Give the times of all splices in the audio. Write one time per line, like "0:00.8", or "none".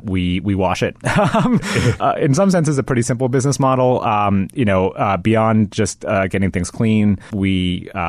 0:02.0
0:07.3